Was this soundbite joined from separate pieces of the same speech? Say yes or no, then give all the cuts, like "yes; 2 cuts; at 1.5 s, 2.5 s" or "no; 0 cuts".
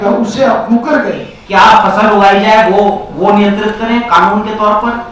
yes; 1 cut; at 1.3 s